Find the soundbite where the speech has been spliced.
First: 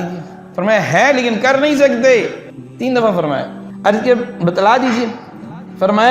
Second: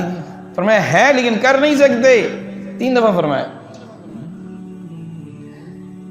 first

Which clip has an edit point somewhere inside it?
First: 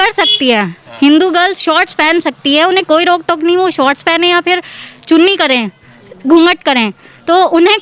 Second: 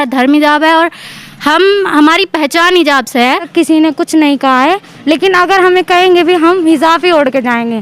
second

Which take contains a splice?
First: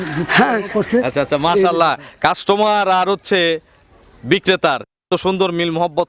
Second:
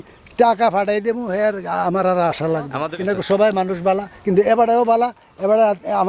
second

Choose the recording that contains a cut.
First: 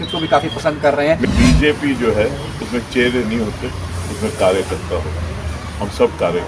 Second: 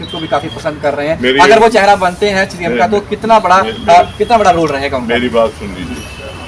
first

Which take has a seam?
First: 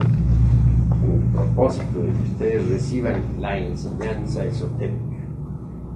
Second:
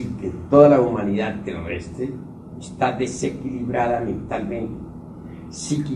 second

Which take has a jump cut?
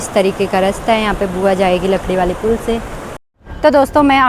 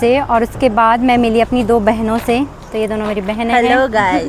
first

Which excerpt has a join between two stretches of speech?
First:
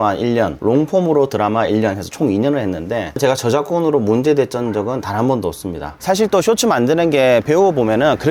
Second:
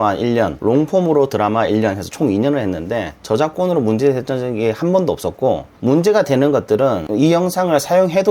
first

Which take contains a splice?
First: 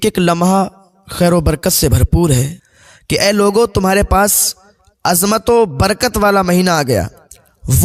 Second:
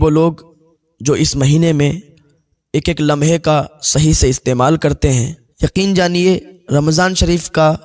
first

